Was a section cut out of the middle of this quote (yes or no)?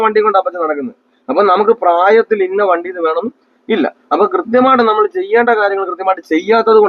no